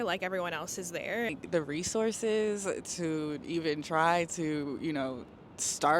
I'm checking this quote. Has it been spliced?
yes; 1 cut; at 1.4 s

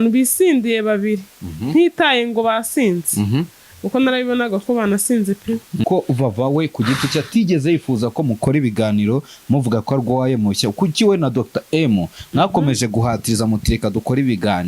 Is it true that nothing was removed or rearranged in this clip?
no; 1 cut; at 5.8 s

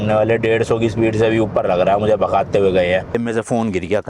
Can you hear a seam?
yes; 1 cut; at 3.1 s

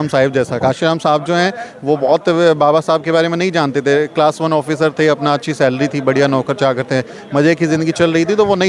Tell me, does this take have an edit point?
no; 0 cuts

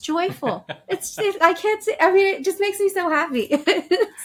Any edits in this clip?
no; 0 cuts

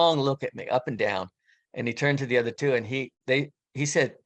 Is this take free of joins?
yes; 0 cuts

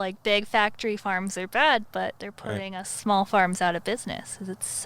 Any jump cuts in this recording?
no; 0 cuts

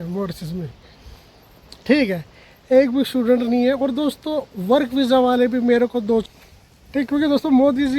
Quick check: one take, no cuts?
no; 1 cut; at 6.2 s

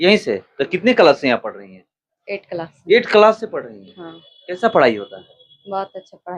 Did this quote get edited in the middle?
no; 0 cuts

